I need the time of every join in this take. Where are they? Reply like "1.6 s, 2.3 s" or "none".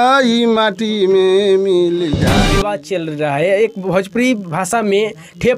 2.5 s